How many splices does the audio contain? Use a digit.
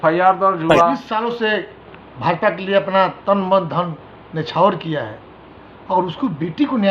1